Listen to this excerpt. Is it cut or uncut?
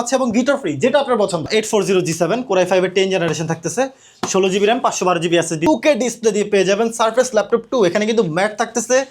cut